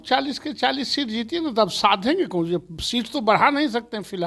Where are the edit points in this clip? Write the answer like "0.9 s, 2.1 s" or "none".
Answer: none